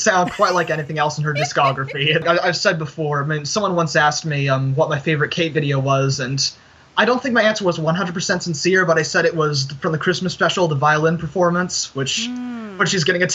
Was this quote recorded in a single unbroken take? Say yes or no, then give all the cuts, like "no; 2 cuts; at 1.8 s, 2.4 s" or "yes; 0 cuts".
no; 1 cut; at 2.2 s